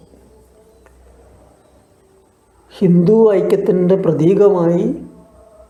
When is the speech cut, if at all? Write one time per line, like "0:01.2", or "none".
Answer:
none